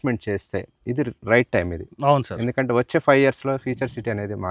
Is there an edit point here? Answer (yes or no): no